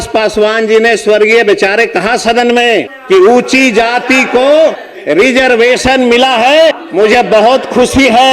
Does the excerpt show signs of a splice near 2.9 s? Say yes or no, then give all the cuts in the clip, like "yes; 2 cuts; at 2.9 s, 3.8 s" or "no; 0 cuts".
yes; 3 cuts; at 2.9 s, 4.9 s, 6.8 s